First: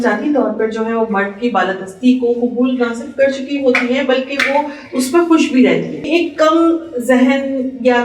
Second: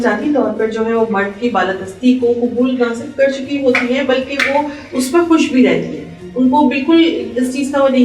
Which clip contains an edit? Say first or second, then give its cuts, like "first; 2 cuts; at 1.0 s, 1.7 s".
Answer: first; 1 cut; at 6.0 s